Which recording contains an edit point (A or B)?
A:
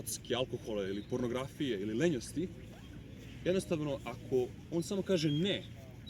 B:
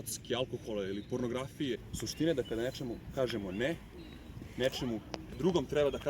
B